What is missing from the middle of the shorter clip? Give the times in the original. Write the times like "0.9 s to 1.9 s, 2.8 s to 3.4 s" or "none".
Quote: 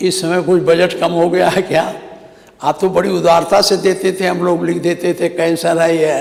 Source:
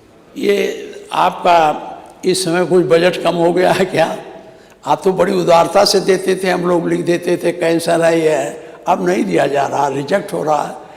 none